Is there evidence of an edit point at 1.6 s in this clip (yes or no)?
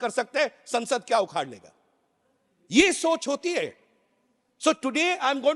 no